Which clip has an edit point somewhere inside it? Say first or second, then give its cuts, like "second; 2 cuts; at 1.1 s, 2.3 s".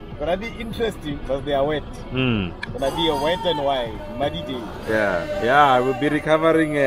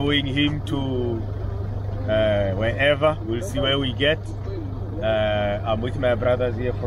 first; 1 cut; at 5.3 s